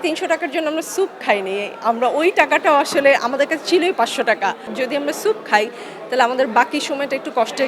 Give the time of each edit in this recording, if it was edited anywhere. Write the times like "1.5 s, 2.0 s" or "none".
4.6 s